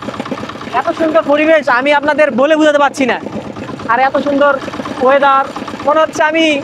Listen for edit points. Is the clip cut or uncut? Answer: uncut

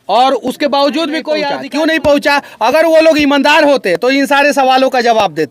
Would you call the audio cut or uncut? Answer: cut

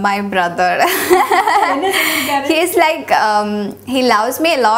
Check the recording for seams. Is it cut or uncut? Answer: uncut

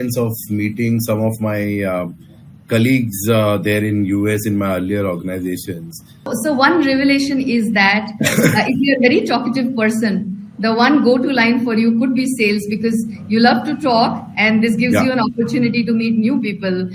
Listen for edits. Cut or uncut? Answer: cut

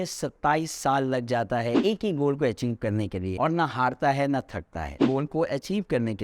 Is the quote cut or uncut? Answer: cut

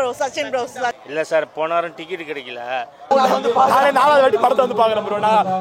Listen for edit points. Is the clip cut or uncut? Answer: cut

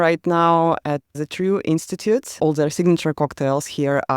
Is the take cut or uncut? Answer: cut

